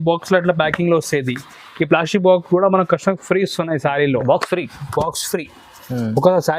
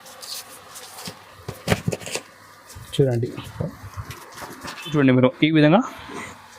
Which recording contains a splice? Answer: second; 1 cut; at 4.9 s

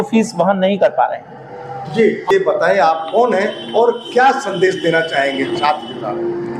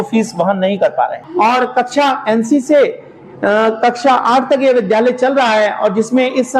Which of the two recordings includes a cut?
second; 1 cut; at 1.2 s

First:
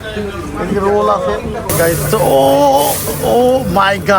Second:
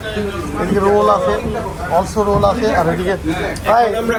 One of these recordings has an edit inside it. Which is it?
first; 2 cuts; at 1.7 s, 3.4 s

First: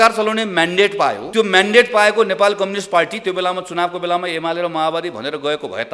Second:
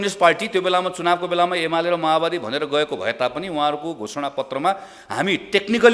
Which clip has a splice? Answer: first; 1 cut; at 1.2 s

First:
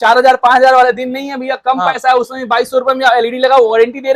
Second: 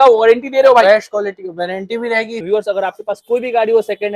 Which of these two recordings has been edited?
second; 1 cut; at 2.4 s

